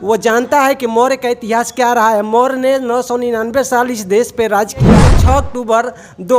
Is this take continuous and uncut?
no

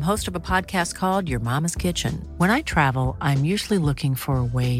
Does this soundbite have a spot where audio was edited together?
no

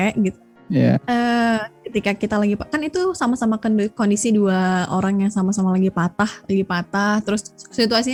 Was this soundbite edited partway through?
no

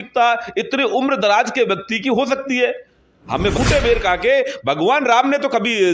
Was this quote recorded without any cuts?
no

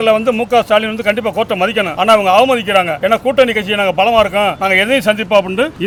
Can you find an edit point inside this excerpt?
no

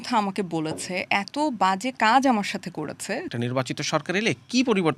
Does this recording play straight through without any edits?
no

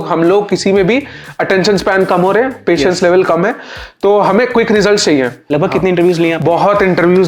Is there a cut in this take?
yes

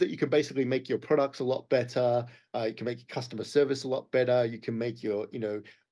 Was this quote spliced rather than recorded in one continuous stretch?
no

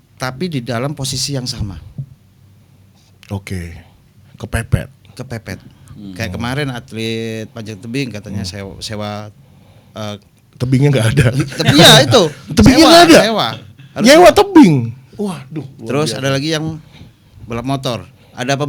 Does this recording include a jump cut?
no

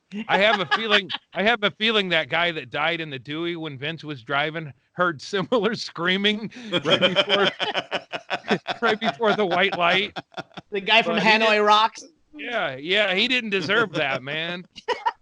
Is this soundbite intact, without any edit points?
yes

